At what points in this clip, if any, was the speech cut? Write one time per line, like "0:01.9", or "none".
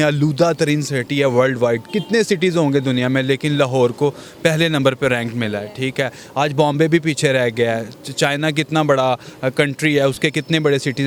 none